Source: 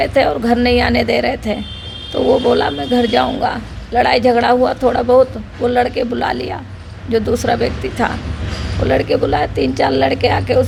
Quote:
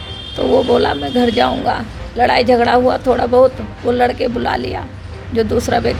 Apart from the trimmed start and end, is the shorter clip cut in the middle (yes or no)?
no